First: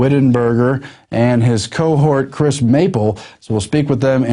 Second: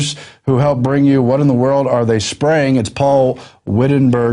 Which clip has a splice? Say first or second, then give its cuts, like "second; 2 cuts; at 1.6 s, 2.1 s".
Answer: first; 1 cut; at 3.3 s